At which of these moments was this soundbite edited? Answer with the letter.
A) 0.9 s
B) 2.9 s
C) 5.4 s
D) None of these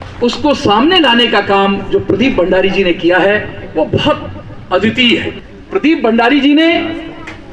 C